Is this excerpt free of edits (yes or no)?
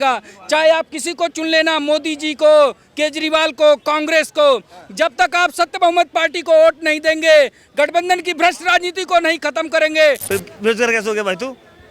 no